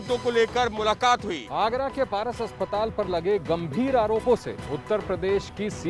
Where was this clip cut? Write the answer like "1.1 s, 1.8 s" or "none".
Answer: 1.4 s